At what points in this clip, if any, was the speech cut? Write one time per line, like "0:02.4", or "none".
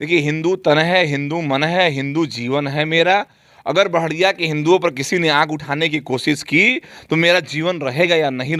none